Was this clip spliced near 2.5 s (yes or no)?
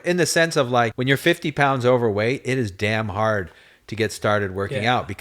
no